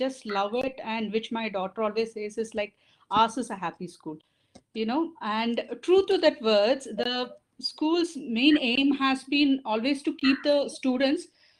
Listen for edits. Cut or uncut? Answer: uncut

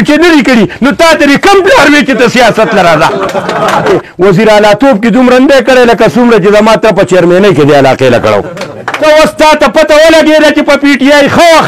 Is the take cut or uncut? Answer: cut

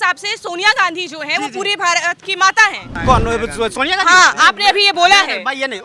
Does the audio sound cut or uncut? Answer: cut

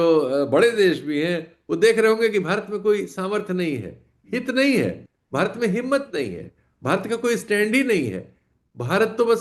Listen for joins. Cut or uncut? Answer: uncut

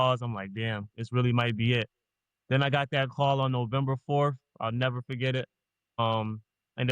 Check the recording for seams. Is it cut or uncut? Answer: uncut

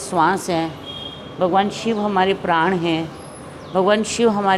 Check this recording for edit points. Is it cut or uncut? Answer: uncut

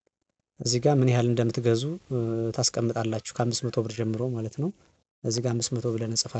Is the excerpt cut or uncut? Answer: uncut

